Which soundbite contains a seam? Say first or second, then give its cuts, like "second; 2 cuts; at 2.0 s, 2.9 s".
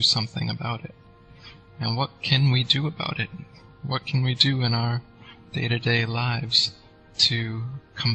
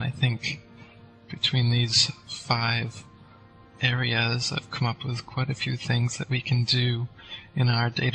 first; 1 cut; at 3.0 s